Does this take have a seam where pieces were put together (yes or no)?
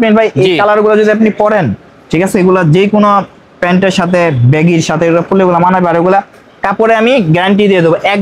no